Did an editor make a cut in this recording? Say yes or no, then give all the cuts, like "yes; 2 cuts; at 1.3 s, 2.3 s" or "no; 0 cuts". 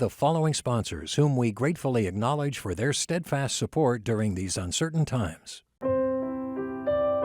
yes; 1 cut; at 5.7 s